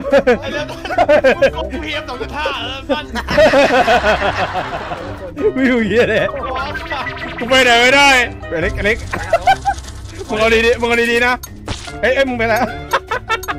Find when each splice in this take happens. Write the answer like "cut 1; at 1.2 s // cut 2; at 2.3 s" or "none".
cut 1; at 8.3 s

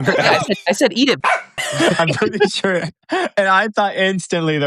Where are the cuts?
cut 1; at 1.6 s

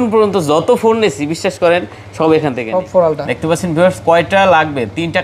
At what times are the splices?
cut 1; at 2.6 s

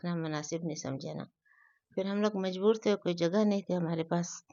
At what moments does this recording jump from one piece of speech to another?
none

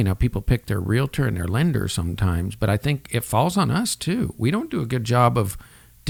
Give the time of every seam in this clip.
none

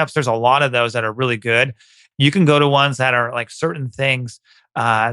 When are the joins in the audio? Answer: cut 1; at 2.0 s

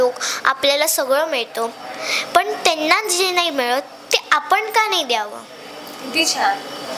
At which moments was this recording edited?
none

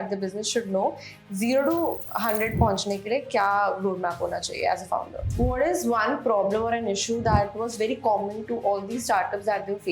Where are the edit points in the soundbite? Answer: cut 1; at 5.2 s

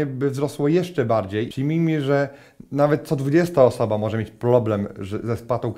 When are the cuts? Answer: cut 1; at 1.5 s

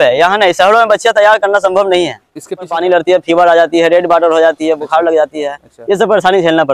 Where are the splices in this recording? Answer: cut 1; at 2.7 s

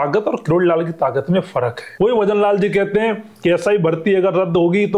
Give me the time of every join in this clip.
cut 1; at 1.8 s

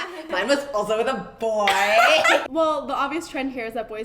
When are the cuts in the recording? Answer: cut 1; at 2.5 s

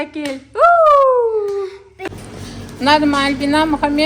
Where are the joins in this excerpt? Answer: cut 1; at 2.1 s

